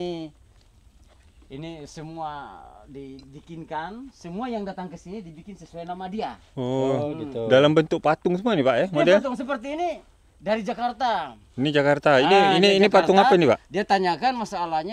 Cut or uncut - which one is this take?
uncut